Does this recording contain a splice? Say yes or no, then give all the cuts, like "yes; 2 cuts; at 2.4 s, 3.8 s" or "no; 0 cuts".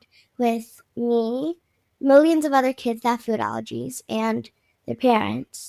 no; 0 cuts